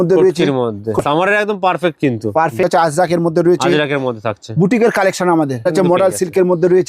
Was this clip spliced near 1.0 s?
yes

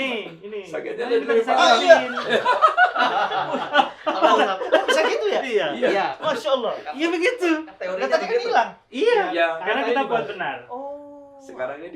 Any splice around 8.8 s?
no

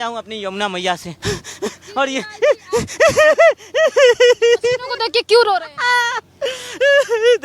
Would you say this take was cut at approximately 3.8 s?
no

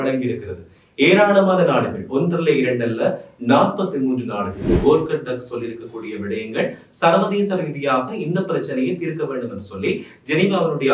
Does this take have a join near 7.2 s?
no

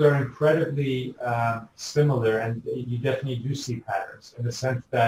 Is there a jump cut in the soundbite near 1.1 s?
no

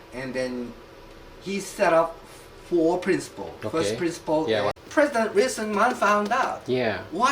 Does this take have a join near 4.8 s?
yes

